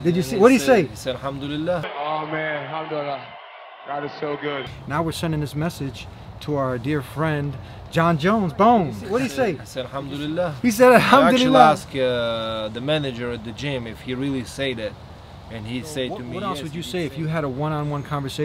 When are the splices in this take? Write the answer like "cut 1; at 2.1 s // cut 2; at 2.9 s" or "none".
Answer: cut 1; at 1.9 s // cut 2; at 4.8 s // cut 3; at 9.0 s // cut 4; at 11.8 s // cut 5; at 16.4 s